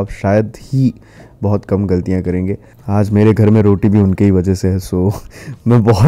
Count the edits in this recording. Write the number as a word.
one